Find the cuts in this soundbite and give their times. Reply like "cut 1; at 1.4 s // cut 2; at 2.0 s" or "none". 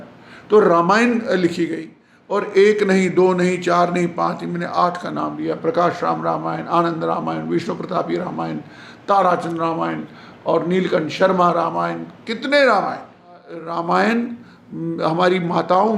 cut 1; at 13.7 s